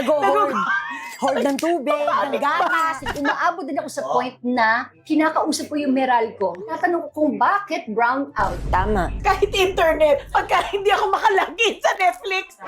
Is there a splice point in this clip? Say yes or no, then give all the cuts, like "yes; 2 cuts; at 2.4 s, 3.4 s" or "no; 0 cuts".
yes; 4 cuts; at 3.0 s, 4.9 s, 6.8 s, 9.1 s